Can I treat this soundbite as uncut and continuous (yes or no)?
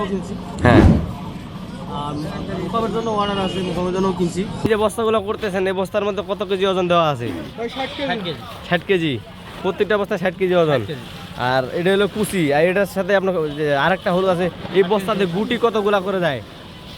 no